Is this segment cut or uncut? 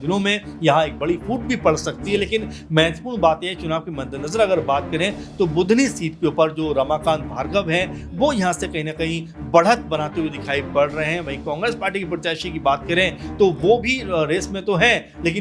uncut